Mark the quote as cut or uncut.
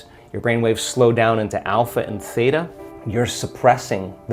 uncut